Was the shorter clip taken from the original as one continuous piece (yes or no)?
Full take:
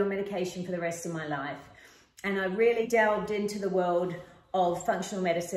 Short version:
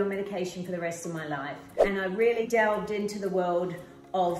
no